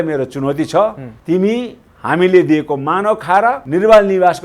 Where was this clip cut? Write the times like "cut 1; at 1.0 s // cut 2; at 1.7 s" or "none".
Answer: cut 1; at 1.1 s // cut 2; at 3.6 s

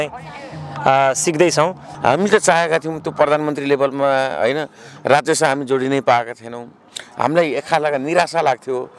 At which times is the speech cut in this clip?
cut 1; at 1.9 s

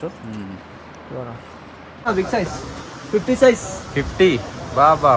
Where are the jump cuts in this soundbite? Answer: cut 1; at 2.1 s

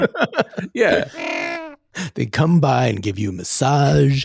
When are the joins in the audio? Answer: cut 1; at 1.3 s

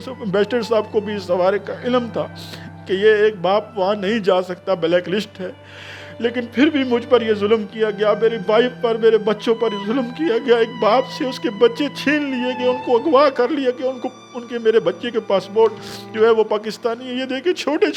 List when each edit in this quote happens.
none

